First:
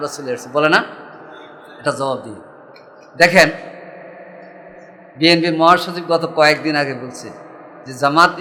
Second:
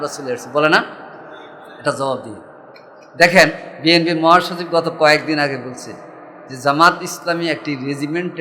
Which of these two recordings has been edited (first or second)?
second